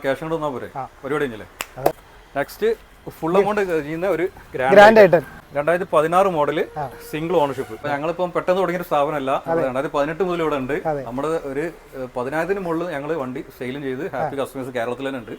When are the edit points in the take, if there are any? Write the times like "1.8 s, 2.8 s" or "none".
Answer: 2.0 s, 5.4 s, 7.9 s